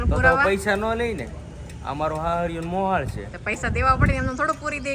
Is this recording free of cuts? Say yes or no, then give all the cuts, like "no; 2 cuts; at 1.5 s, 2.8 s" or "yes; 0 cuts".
yes; 0 cuts